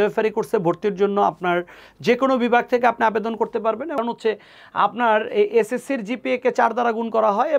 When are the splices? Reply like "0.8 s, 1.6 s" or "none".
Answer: 4.0 s